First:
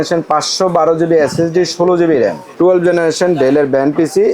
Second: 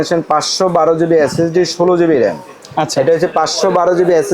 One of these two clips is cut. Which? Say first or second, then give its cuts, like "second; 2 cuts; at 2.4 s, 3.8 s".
first; 1 cut; at 2.4 s